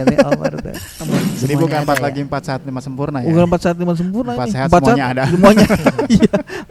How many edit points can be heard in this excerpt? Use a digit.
1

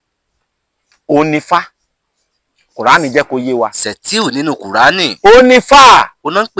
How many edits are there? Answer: 0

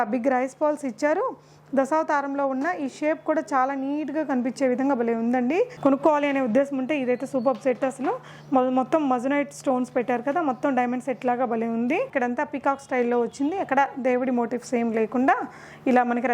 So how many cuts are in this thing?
2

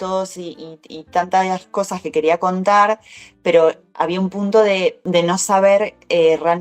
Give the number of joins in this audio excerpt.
1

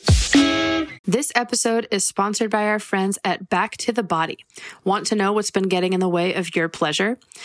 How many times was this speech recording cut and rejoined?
1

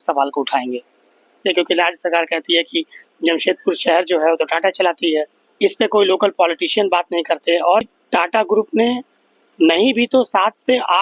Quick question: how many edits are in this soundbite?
3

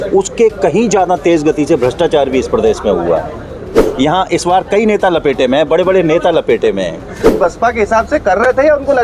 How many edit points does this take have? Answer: 2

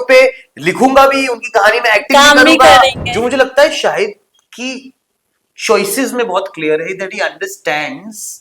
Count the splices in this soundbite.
1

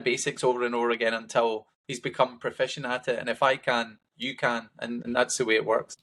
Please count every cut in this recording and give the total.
1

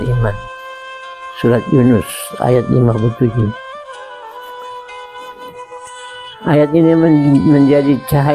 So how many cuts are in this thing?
2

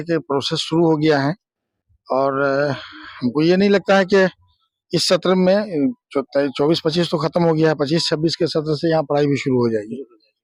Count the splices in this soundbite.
0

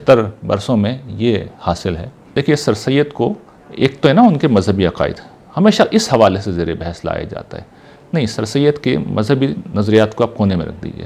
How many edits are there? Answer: 1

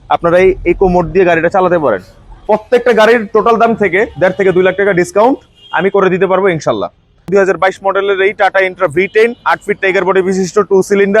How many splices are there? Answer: 2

